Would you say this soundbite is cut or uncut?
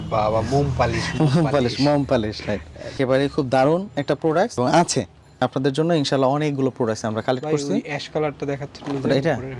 uncut